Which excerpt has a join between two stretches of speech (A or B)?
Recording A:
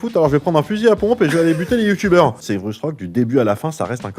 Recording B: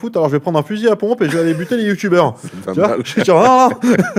A